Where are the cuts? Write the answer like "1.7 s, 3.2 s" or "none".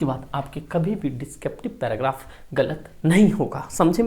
none